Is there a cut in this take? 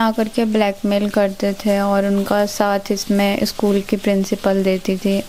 no; 0 cuts

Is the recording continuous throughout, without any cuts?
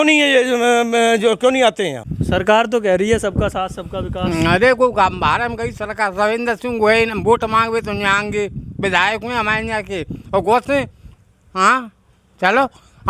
no; 1 cut; at 2.1 s

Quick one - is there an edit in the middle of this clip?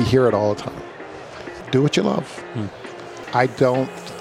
yes; 2 cuts; at 1.6 s, 3.2 s

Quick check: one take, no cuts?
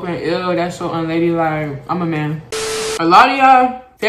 no; 1 cut; at 2.6 s

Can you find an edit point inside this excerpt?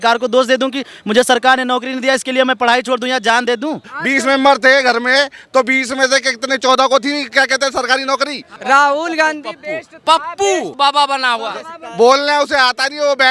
yes; 3 cuts; at 3.8 s, 8.5 s, 10.8 s

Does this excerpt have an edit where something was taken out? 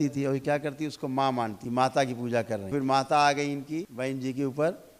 yes; 3 cuts; at 1.6 s, 2.7 s, 3.9 s

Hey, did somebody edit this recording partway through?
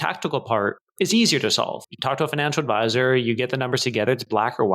yes; 2 cuts; at 0.8 s, 1.9 s

